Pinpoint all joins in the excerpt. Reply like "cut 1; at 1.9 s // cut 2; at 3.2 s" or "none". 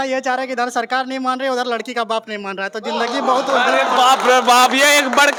none